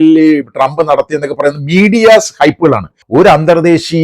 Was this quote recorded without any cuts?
no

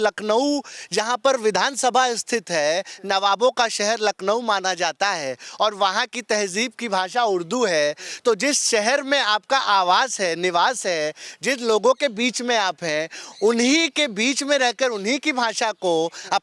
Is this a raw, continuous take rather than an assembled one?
yes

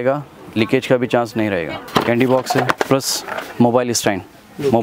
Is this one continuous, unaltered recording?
no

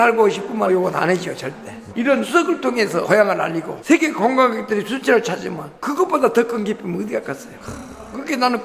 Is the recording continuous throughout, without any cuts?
yes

